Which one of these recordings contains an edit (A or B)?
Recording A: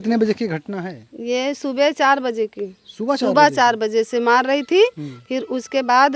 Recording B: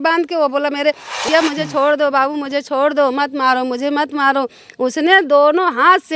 B